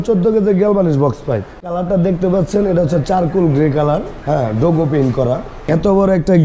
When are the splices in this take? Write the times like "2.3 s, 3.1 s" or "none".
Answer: 1.6 s, 4.2 s, 5.7 s

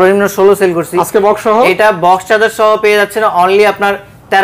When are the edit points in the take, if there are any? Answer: none

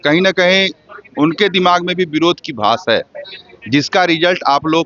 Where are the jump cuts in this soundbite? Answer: none

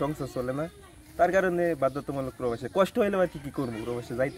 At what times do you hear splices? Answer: none

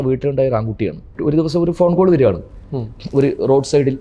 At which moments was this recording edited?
1.1 s

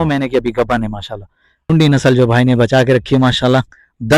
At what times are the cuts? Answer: 1.7 s

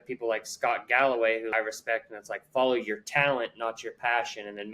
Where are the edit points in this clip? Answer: 1.5 s

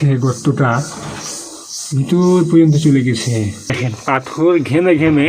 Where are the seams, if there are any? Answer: 3.9 s

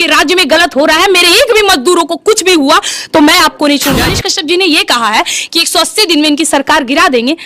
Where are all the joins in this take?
4.2 s

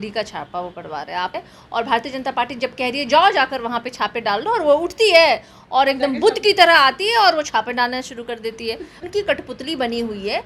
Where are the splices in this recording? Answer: 1.3 s, 8.9 s

